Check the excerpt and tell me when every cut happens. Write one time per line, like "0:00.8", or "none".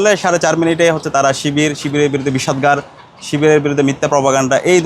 none